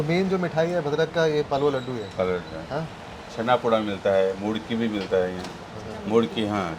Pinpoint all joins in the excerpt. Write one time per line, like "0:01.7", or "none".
none